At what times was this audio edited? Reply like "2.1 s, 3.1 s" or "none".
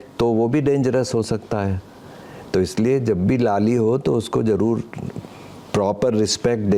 none